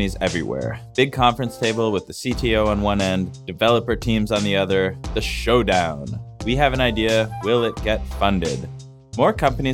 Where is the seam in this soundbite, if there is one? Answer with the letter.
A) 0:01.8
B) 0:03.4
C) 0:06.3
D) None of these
B